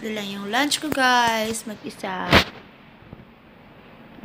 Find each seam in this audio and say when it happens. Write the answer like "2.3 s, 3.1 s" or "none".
none